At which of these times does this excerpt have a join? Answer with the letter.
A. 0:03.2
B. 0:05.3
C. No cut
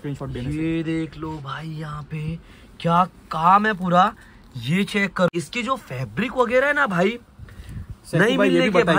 B